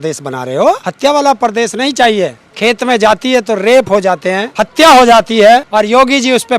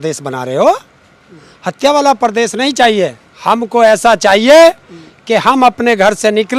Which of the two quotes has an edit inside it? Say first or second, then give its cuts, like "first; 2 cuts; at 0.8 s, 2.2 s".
first; 4 cuts; at 0.9 s, 2.4 s, 4.5 s, 5.7 s